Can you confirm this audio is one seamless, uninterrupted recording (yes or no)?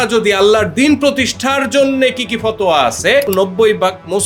no